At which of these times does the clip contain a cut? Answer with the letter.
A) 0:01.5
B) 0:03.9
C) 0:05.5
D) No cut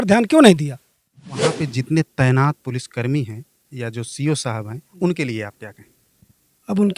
A